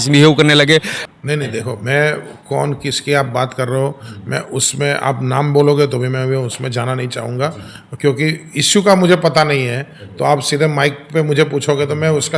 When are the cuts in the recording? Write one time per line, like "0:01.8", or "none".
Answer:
0:01.0